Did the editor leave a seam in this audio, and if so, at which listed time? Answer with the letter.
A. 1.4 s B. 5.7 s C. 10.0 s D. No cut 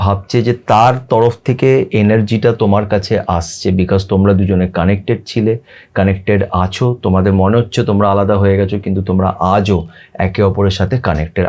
D